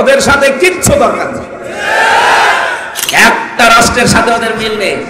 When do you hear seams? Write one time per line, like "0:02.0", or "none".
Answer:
0:02.9